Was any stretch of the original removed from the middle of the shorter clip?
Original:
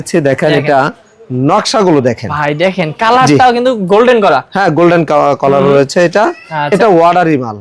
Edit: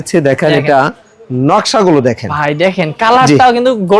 no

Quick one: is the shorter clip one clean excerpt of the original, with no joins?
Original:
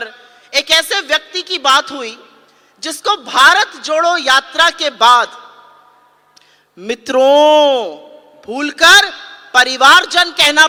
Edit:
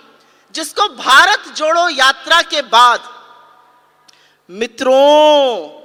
yes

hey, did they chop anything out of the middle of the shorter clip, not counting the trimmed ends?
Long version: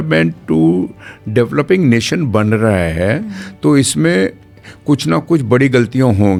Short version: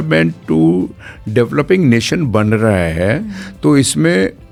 no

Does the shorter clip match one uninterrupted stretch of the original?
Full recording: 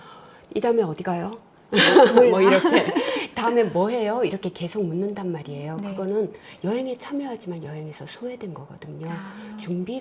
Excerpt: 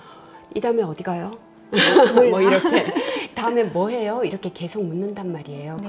yes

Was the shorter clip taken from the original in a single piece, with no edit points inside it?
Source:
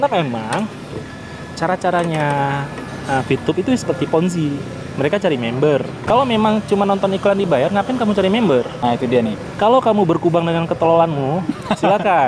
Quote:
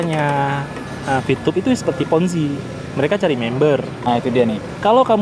no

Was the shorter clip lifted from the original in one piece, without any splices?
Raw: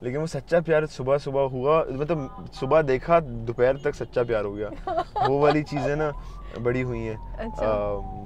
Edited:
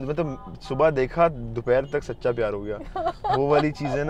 yes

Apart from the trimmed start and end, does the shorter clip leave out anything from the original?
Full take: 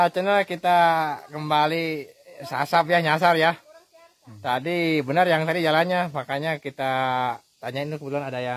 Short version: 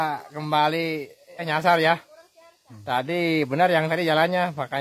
yes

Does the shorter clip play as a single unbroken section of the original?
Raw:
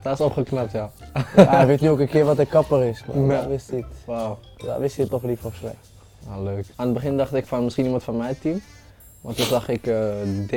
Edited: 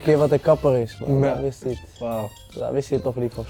yes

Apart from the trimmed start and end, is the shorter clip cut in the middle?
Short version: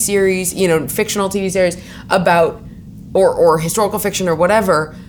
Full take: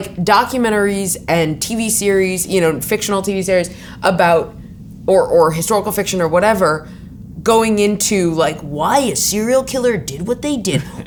no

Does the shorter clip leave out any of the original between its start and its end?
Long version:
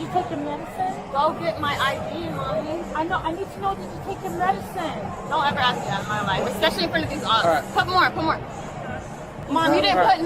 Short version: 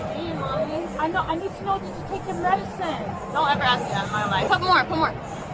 yes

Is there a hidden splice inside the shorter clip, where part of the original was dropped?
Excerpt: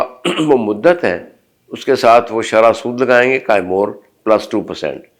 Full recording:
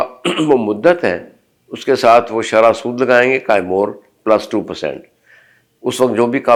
no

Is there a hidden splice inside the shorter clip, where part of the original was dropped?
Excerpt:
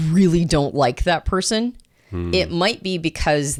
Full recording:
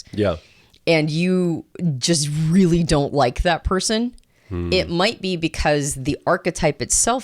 no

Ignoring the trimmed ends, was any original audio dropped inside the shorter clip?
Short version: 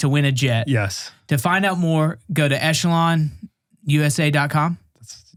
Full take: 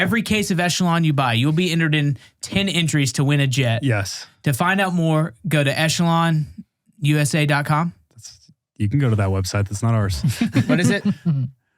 no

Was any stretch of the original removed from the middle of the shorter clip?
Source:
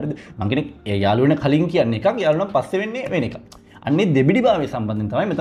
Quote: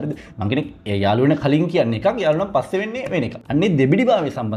yes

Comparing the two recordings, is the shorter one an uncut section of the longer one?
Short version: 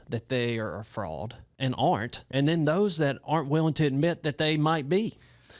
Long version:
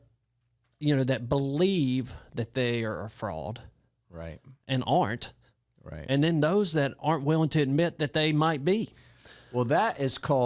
no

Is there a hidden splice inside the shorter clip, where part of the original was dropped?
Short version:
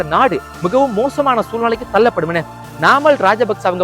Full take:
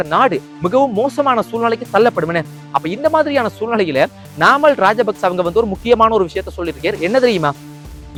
yes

